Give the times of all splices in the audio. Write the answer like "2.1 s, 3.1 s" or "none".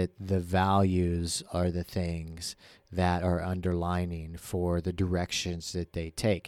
none